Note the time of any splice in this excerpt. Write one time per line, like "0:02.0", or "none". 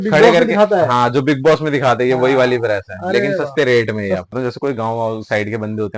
0:04.3